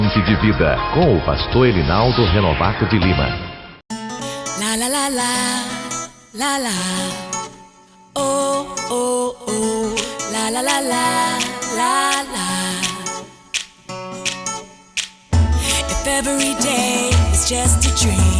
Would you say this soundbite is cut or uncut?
cut